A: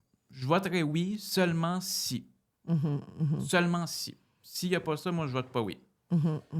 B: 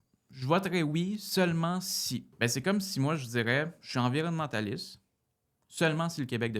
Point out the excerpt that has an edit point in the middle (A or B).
B